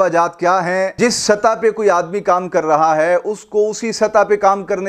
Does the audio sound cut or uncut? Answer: cut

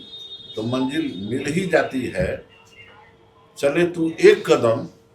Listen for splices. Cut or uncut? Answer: uncut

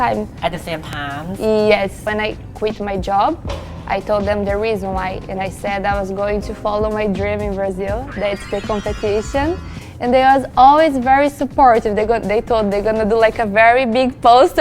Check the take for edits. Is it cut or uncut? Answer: cut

